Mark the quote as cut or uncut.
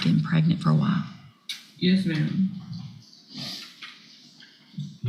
uncut